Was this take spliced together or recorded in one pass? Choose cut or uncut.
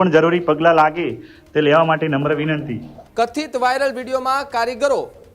cut